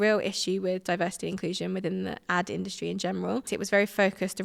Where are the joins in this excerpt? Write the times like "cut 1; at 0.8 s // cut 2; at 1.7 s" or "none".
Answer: cut 1; at 3.5 s